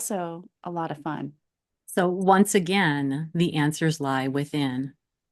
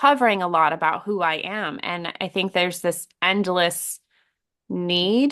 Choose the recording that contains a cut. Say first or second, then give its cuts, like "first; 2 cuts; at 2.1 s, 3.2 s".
first; 1 cut; at 1.4 s